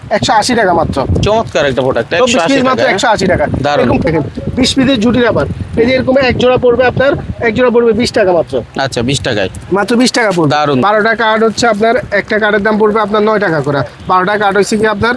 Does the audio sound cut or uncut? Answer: cut